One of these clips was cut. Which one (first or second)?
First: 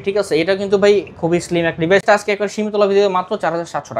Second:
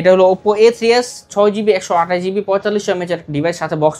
first